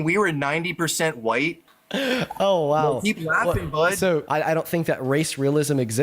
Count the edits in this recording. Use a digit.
2